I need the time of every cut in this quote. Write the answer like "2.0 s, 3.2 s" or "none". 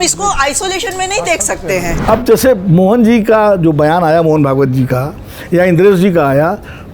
1.9 s